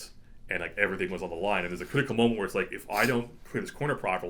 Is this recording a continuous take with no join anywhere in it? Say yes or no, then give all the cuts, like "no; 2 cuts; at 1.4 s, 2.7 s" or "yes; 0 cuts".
yes; 0 cuts